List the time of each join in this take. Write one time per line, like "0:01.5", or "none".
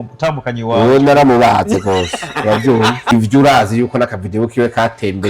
0:03.1